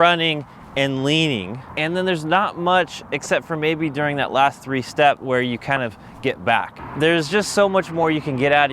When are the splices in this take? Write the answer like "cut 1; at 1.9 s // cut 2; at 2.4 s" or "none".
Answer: cut 1; at 1.6 s // cut 2; at 6.8 s